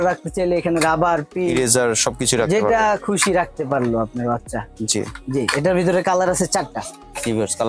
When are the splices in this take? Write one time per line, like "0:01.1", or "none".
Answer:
none